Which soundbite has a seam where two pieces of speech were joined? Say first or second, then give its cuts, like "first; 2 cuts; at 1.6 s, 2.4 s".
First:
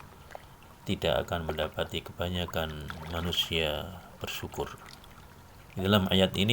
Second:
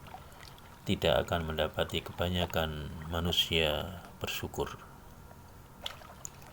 first; 1 cut; at 5.5 s